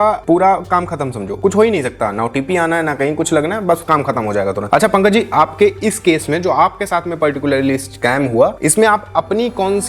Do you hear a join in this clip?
no; 0 cuts

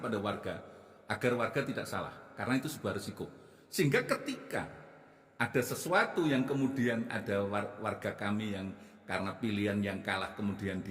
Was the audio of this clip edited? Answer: no; 0 cuts

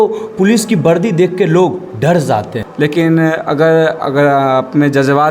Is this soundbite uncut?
no; 1 cut; at 2.6 s

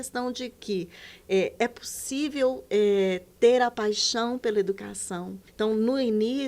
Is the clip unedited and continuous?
no; 1 cut; at 5.4 s

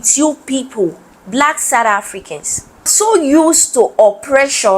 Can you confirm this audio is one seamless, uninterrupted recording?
no; 1 cut; at 2.9 s

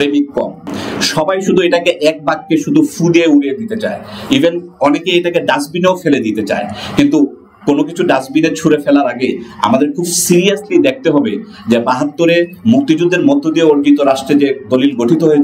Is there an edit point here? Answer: no; 0 cuts

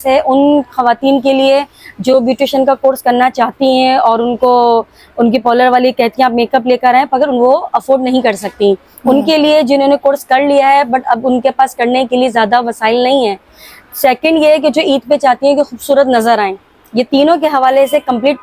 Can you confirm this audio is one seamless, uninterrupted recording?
yes; 0 cuts

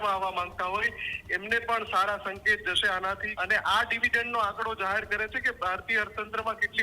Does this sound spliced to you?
yes; 1 cut; at 3.3 s

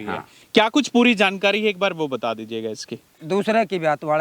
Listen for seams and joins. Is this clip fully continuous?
no; 1 cut; at 3.1 s

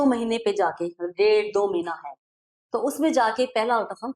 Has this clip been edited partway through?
no; 0 cuts

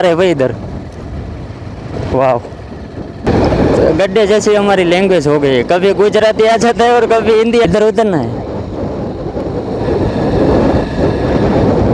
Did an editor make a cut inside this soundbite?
yes; 2 cuts; at 3.3 s, 7.6 s

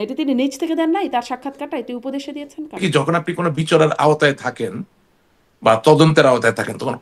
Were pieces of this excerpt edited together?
yes; 1 cut; at 2.8 s

